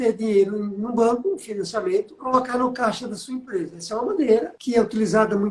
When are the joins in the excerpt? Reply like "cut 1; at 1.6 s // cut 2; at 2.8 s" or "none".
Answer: cut 1; at 2.2 s // cut 2; at 4.6 s